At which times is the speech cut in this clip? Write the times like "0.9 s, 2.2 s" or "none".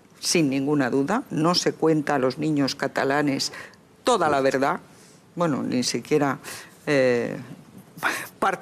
6.5 s